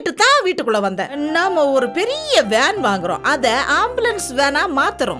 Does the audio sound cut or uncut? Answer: cut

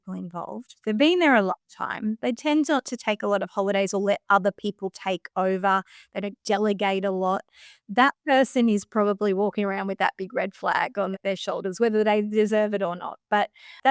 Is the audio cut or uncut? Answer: uncut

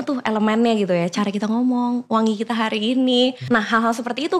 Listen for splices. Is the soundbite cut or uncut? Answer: cut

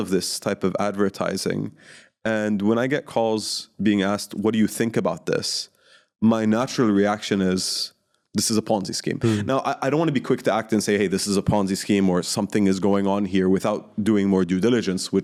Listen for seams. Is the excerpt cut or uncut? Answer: uncut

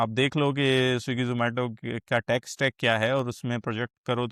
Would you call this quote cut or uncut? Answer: uncut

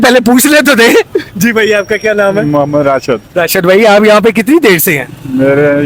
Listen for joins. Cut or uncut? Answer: uncut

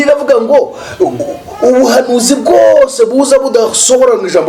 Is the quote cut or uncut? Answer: uncut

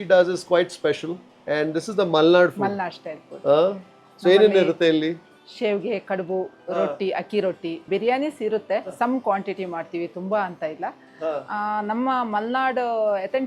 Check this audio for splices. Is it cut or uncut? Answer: uncut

